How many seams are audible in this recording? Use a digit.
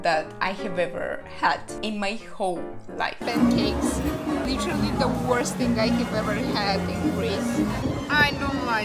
3